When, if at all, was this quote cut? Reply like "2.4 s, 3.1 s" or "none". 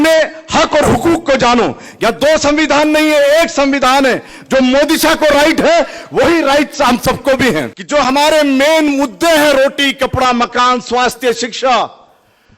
7.8 s